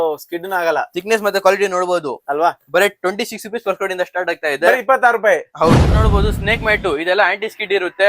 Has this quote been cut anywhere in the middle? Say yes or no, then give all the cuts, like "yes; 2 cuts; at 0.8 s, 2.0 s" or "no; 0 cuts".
yes; 1 cut; at 6.0 s